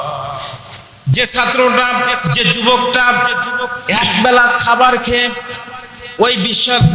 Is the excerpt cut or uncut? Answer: cut